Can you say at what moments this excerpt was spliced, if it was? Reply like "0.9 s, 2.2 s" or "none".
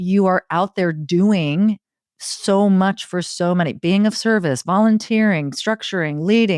none